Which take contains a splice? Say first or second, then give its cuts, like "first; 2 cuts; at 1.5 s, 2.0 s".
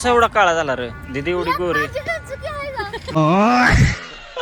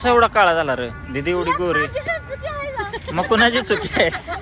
second; 1 cut; at 3.1 s